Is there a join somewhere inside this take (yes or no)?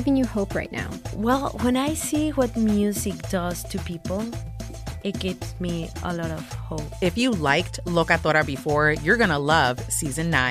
no